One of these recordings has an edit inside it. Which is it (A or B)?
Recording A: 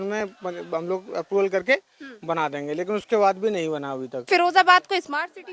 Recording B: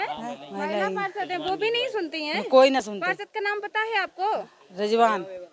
A